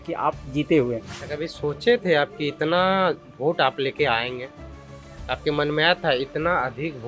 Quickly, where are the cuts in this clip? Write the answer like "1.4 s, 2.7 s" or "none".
1.1 s